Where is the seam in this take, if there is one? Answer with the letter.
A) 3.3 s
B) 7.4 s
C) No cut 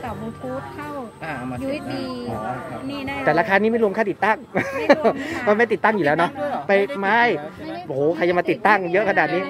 C